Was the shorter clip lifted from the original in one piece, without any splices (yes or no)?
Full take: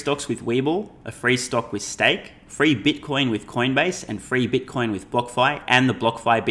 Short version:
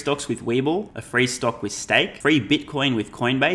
no